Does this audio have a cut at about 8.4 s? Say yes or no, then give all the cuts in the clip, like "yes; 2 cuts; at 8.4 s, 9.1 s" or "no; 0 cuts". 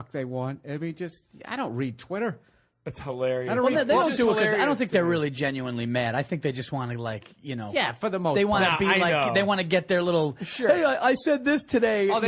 no; 1 cut; at 3.5 s